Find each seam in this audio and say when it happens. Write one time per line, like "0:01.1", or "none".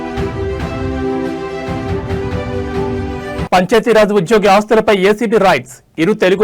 0:03.4